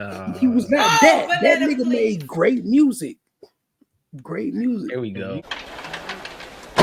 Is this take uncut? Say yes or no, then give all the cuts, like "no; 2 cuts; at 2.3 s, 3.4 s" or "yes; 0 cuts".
yes; 0 cuts